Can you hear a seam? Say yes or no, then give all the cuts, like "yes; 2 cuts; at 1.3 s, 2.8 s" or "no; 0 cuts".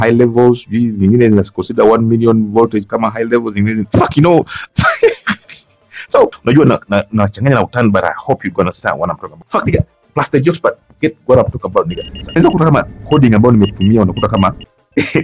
yes; 3 cuts; at 6.4 s, 9.3 s, 12.4 s